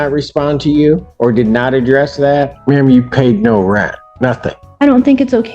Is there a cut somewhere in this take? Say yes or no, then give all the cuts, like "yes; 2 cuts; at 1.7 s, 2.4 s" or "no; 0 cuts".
yes; 3 cuts; at 1.1 s, 2.5 s, 4.3 s